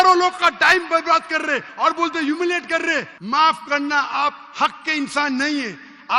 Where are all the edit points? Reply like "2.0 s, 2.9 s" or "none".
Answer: 3.1 s